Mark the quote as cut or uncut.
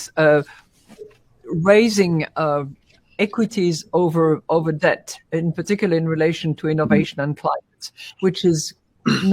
uncut